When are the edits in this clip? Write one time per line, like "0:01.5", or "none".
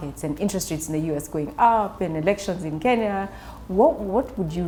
none